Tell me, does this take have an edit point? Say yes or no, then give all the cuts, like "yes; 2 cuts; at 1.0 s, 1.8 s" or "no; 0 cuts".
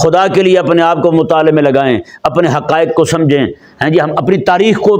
no; 0 cuts